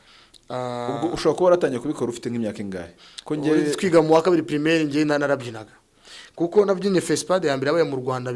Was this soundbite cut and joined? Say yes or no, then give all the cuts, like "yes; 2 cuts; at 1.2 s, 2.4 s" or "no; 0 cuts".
no; 0 cuts